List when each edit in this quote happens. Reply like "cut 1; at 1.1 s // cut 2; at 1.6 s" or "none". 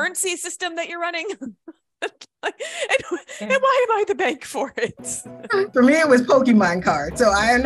cut 1; at 5.7 s